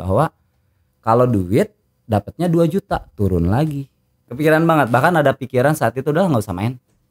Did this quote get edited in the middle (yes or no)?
yes